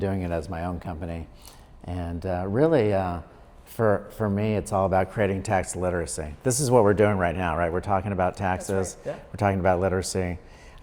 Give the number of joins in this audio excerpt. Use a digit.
0